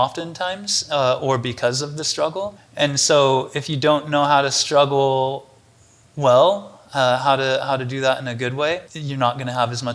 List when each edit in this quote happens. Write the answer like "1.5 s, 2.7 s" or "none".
2.6 s, 9.0 s